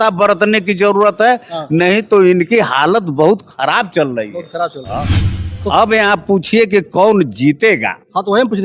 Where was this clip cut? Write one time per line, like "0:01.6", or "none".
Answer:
0:05.2